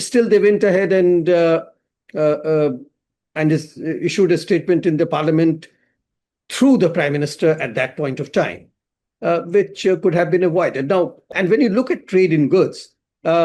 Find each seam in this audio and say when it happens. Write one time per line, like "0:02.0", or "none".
0:11.2